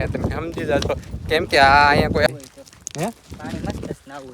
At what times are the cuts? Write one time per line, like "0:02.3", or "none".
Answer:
0:02.3